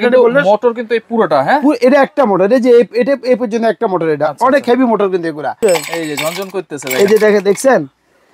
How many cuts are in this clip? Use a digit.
1